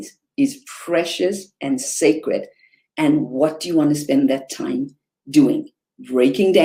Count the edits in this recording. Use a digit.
0